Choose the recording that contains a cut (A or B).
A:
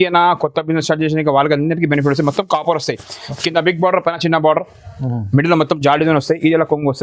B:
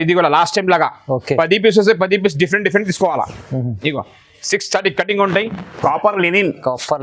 B